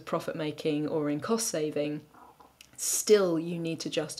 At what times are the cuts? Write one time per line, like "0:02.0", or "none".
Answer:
none